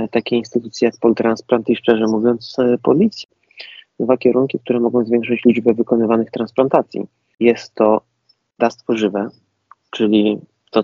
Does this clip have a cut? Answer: yes; 2 cuts; at 3.2 s, 7.3 s

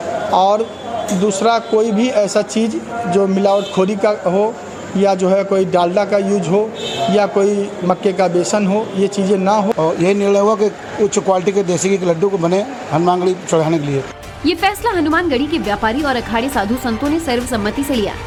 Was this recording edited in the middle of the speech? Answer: no; 0 cuts

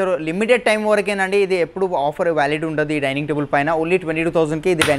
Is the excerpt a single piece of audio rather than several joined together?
yes; 0 cuts

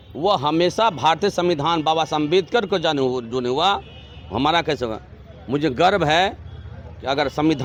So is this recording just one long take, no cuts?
yes; 0 cuts

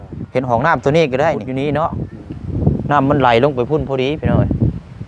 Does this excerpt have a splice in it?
yes; 1 cut; at 1.5 s

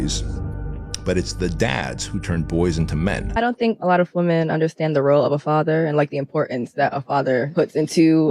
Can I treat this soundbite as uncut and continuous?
no; 1 cut; at 3.3 s

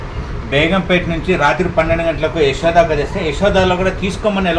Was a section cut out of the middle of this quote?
no; 0 cuts

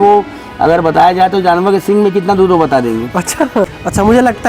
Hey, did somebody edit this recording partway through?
yes; 1 cut; at 3.5 s

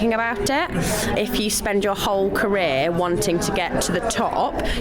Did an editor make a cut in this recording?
yes; 1 cut; at 1.1 s

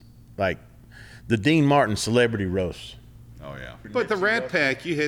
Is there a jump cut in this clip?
yes; 1 cut; at 3.9 s

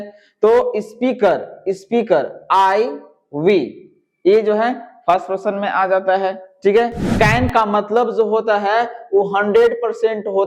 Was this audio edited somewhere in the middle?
yes; 1 cut; at 7.0 s

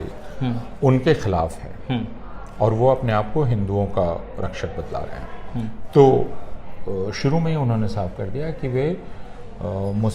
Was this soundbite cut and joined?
no; 0 cuts

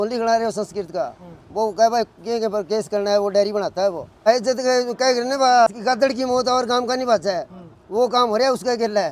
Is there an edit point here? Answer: yes; 2 cuts; at 4.3 s, 5.7 s

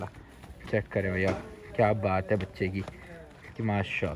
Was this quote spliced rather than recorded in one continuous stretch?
no; 0 cuts

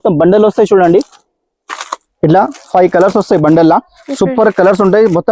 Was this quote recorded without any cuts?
yes; 0 cuts

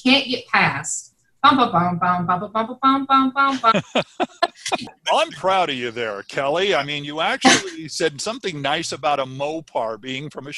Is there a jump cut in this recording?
yes; 1 cut; at 4.9 s

